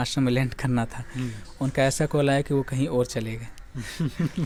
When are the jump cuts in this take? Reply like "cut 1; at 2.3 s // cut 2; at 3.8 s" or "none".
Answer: none